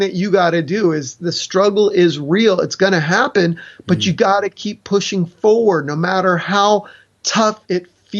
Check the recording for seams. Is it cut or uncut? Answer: uncut